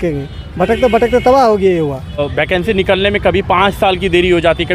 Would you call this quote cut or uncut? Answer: cut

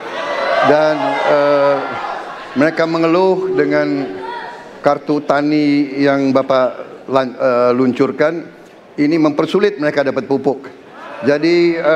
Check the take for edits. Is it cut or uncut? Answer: uncut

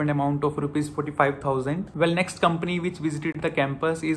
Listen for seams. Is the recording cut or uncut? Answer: cut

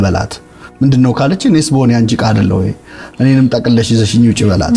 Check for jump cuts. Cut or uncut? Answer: uncut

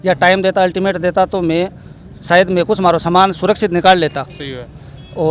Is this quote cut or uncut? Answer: uncut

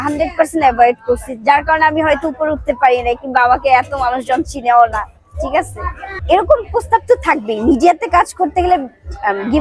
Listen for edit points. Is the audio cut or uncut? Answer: uncut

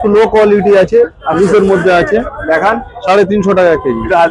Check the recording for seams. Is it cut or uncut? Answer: uncut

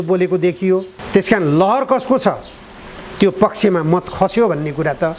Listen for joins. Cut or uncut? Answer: cut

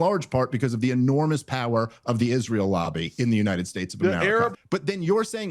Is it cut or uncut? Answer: cut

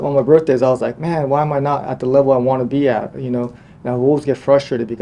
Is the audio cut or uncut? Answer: uncut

